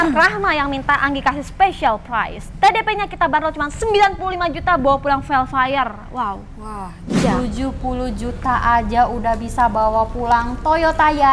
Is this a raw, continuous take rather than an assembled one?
no; 1 cut; at 7.2 s

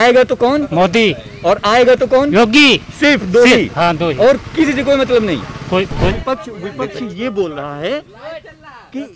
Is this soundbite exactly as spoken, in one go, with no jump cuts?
no; 1 cut; at 6.1 s

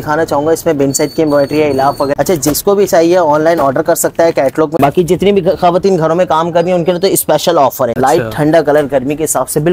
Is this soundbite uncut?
no; 3 cuts; at 2.1 s, 4.8 s, 7.9 s

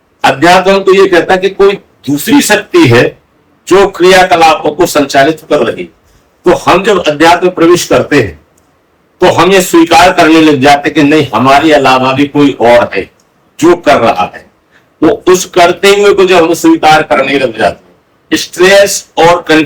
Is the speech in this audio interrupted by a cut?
no; 0 cuts

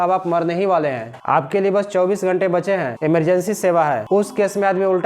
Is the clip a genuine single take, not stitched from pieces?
no; 3 cuts; at 1.1 s, 2.9 s, 4.0 s

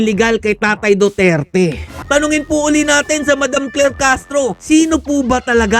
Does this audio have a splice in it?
yes; 2 cuts; at 1.9 s, 4.6 s

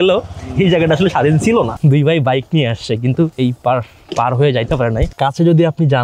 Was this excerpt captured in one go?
no; 3 cuts; at 1.7 s, 3.3 s, 5.1 s

